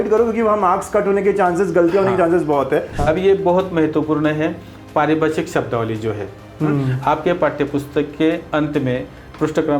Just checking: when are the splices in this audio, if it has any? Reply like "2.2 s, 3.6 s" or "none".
2.9 s